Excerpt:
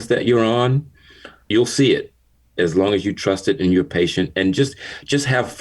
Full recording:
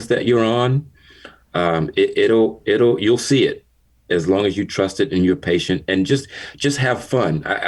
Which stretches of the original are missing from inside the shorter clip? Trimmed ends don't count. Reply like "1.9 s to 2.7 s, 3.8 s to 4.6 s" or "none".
1.5 s to 3.0 s